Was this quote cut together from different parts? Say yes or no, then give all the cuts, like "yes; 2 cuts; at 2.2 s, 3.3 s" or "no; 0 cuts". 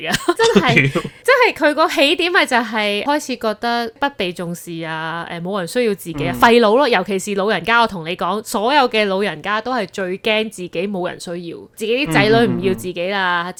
no; 0 cuts